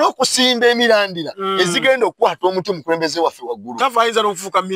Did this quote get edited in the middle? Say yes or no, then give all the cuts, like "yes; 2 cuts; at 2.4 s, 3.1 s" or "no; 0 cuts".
no; 0 cuts